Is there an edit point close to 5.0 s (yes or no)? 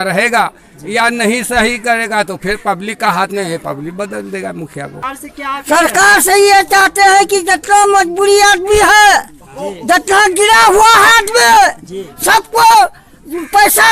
yes